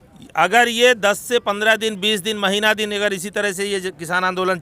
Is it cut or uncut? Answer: uncut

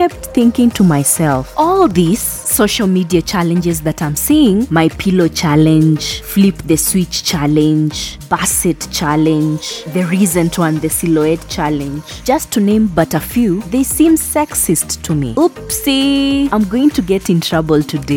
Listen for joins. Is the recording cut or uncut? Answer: uncut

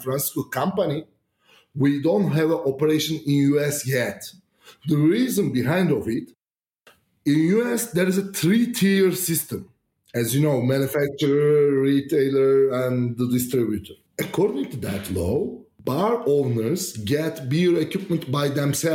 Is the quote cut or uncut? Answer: cut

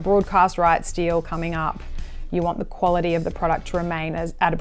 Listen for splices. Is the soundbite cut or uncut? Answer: uncut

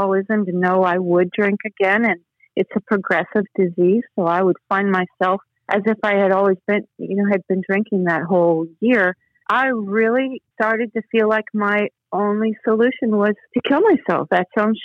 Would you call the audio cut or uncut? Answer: uncut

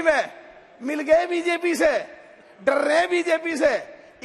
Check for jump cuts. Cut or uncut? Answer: uncut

